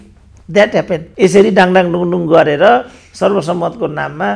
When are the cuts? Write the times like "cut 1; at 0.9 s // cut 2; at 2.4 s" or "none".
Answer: cut 1; at 1.1 s